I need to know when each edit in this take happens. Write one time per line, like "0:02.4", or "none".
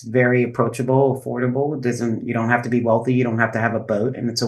none

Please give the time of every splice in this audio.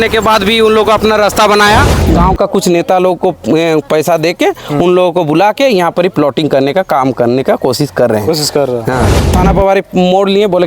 0:02.0
0:09.3

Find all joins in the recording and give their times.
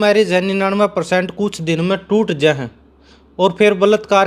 none

